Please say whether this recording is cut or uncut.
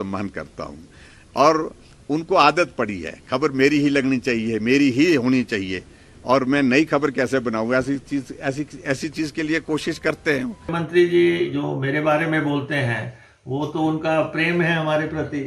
cut